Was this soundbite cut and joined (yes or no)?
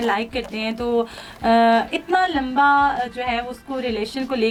no